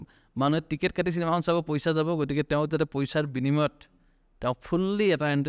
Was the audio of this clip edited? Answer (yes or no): no